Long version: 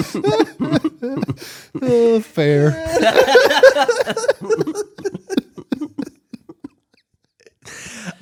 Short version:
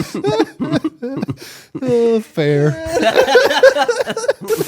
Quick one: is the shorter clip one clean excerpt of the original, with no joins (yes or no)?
yes